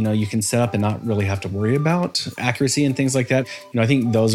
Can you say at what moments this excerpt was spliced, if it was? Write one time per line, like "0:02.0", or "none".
0:02.3
0:03.4